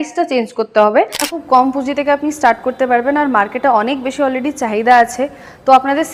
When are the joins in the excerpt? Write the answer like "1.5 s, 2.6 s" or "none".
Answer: 1.3 s

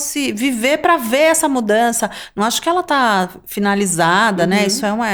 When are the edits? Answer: none

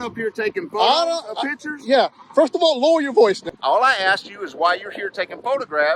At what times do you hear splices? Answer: 3.5 s

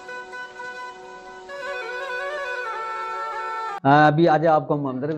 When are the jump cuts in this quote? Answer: 3.8 s

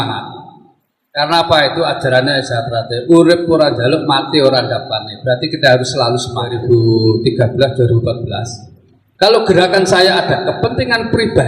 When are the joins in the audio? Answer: 6.6 s

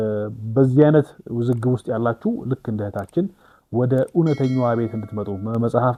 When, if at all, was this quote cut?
none

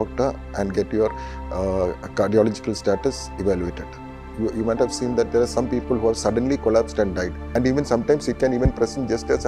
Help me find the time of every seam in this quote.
4.2 s, 7.5 s

